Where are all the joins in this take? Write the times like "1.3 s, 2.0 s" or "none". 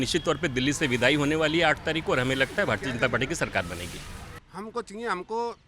4.3 s